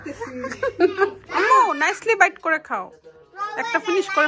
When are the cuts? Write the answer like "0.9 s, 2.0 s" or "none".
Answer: 1.2 s